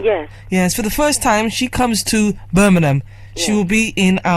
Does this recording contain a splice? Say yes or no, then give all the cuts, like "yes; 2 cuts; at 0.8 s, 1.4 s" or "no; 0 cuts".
yes; 1 cut; at 2.4 s